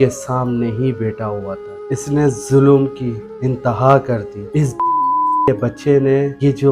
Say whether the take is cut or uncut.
cut